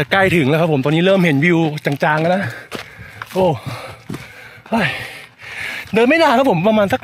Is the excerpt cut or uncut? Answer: uncut